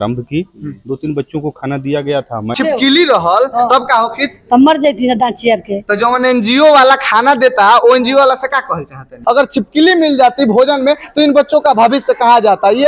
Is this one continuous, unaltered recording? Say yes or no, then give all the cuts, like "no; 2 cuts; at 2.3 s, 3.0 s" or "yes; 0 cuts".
no; 2 cuts; at 2.5 s, 9.2 s